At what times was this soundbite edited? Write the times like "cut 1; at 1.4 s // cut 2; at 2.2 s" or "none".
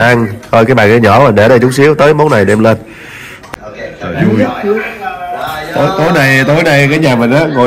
cut 1; at 3.6 s